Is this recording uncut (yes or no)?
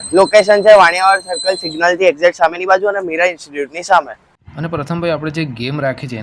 yes